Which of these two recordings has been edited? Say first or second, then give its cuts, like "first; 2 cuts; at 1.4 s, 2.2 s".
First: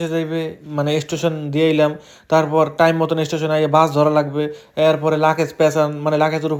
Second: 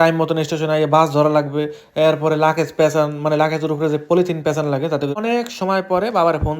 second; 1 cut; at 5.1 s